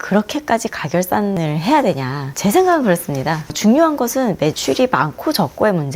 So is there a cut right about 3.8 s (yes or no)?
no